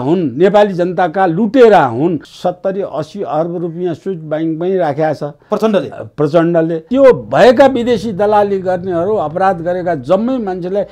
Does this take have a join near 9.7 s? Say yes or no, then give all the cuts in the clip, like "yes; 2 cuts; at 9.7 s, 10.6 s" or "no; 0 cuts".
no; 2 cuts; at 2.3 s, 6.8 s